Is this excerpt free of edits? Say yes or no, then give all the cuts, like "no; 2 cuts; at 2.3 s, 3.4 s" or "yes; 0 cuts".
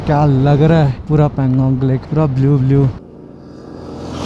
no; 3 cuts; at 1.0 s, 2.0 s, 3.0 s